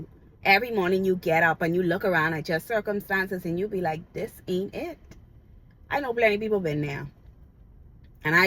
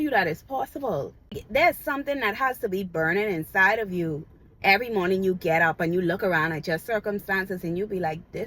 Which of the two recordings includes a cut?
second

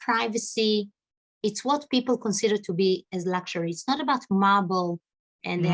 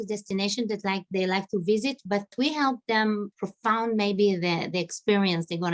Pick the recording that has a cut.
second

